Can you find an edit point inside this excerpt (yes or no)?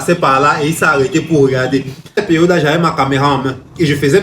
yes